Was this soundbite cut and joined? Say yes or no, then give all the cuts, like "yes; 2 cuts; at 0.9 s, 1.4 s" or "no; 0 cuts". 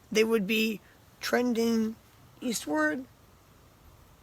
no; 0 cuts